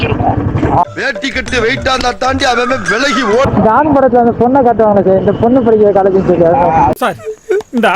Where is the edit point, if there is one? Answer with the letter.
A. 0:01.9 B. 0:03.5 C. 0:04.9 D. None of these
B